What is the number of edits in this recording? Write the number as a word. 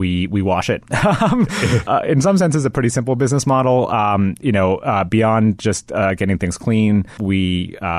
two